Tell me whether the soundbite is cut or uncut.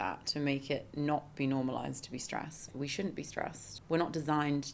cut